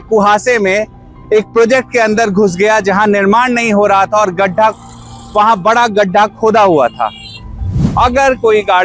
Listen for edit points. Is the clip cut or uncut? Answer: cut